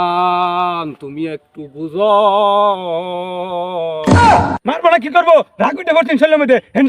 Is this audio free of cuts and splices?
no; 2 cuts; at 4.0 s, 4.6 s

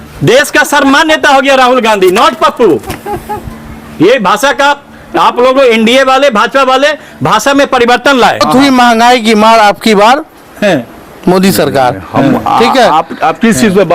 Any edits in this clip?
yes; 1 cut; at 8.5 s

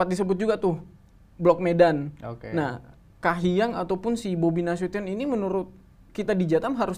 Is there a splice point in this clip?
no; 0 cuts

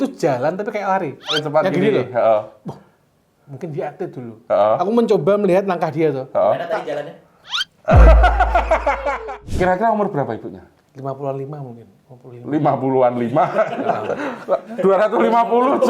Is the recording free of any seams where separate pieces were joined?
no; 2 cuts; at 1.4 s, 9.2 s

